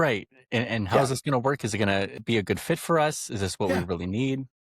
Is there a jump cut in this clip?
yes; 1 cut; at 2.2 s

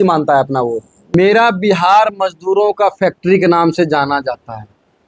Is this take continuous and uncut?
no; 1 cut; at 1.1 s

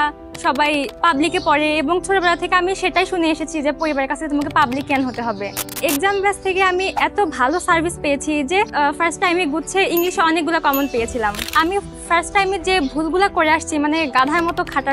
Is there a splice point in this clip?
yes; 4 cuts; at 0.9 s, 5.8 s, 8.7 s, 11.6 s

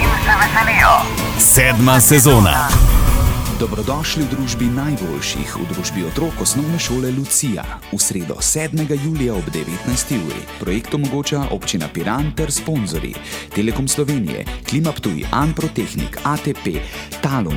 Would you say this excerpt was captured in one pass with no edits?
yes; 0 cuts

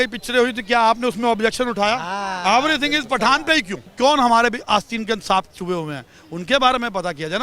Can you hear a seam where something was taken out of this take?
yes; 1 cut; at 3.9 s

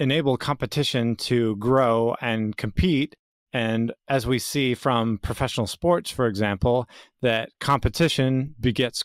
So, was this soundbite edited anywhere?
no; 0 cuts

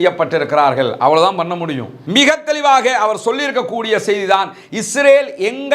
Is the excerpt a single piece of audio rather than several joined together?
no; 1 cut; at 2.0 s

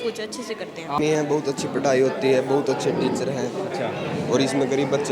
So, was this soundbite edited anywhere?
yes; 1 cut; at 1.0 s

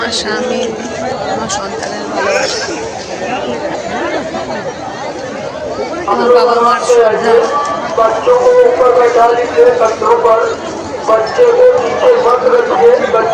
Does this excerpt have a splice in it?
no; 0 cuts

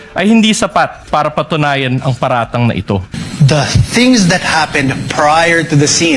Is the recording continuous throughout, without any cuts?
no; 1 cut; at 3.2 s

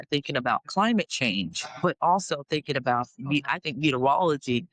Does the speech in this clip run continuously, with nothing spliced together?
yes; 0 cuts

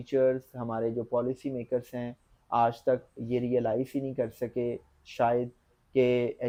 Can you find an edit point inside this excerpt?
no; 0 cuts

